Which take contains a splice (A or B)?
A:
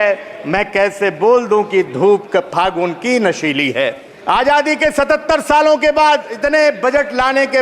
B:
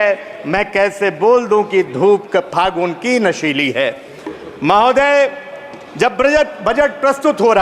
A